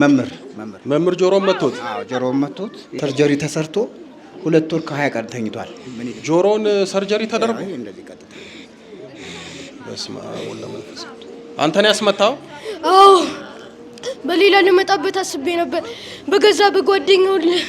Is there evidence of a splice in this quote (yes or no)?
no